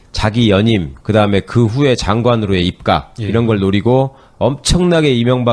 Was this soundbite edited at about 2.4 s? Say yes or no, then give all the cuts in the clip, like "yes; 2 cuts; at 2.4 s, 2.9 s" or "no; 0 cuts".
yes; 1 cut; at 2.4 s